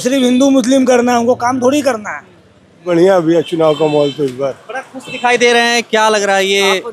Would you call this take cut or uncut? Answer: cut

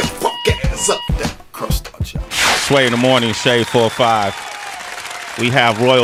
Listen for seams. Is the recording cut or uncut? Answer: uncut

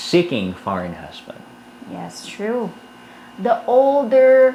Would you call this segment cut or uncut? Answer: uncut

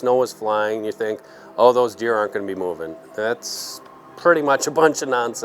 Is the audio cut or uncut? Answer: uncut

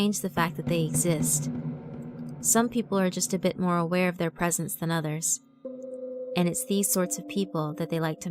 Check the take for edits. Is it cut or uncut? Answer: cut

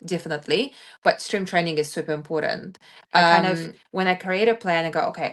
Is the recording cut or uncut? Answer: cut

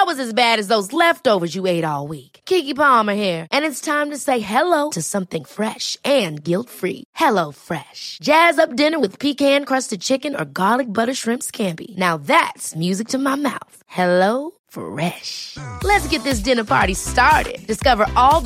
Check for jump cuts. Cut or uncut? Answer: uncut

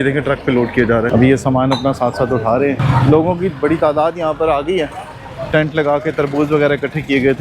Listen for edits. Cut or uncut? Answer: cut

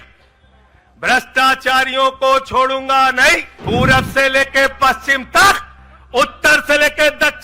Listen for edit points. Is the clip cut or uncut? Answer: cut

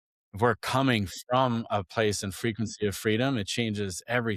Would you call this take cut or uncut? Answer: uncut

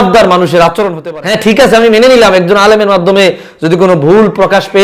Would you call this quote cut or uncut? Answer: cut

